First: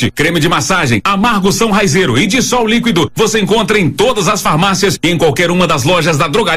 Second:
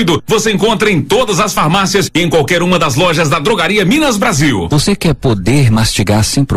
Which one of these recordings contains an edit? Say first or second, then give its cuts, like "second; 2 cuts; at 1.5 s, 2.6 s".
second; 1 cut; at 4.7 s